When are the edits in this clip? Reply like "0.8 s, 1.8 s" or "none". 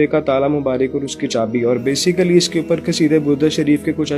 none